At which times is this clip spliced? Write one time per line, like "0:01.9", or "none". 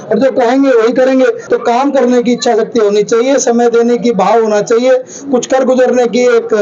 0:01.4